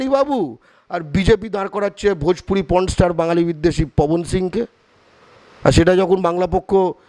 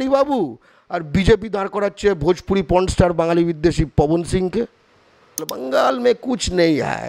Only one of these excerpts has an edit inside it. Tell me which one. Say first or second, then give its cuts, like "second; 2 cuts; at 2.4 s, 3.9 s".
second; 1 cut; at 5.5 s